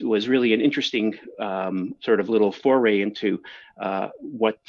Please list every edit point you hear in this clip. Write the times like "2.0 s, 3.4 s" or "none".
none